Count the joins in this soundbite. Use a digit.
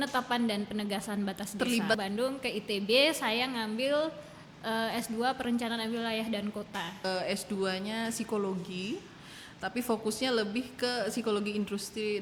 2